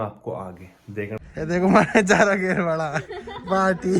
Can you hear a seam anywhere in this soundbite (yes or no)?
yes